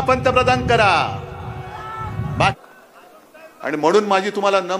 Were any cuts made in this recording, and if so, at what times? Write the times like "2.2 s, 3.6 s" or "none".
2.5 s